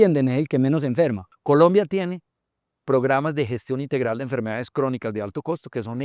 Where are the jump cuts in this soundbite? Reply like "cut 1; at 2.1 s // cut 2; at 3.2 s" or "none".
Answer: cut 1; at 1.3 s